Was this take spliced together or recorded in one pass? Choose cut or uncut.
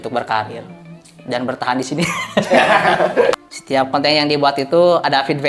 cut